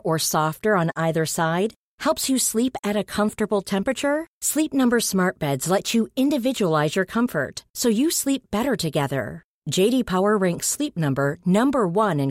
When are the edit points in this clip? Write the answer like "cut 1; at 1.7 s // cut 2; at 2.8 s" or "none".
none